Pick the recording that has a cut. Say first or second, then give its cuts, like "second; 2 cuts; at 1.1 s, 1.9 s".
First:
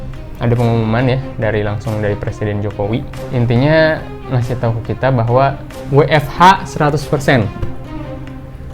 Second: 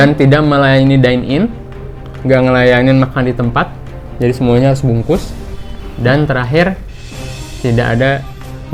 first; 1 cut; at 3.2 s